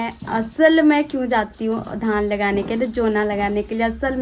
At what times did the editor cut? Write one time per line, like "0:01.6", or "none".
none